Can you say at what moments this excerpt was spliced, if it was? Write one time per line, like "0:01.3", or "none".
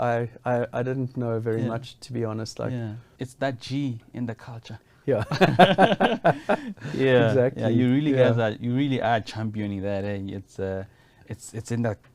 0:03.1